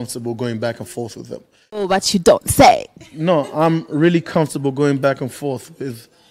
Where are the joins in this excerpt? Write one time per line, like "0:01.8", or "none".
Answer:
0:01.9